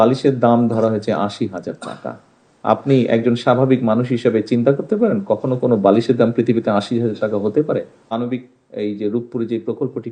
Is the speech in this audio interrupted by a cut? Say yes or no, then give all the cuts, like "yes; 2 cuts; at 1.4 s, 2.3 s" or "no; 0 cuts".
yes; 1 cut; at 8.1 s